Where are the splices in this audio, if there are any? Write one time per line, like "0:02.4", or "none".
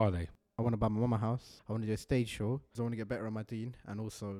0:01.5
0:02.8